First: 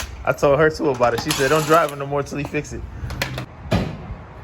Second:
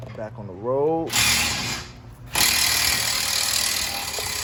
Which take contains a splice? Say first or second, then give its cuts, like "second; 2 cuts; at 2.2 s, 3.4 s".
first; 1 cut; at 3.5 s